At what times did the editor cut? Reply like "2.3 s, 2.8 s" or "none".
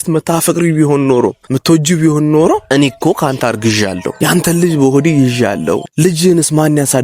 1.5 s, 2.7 s, 4.1 s, 5.9 s